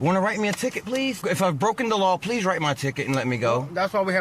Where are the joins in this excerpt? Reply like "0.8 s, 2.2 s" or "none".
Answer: 1.2 s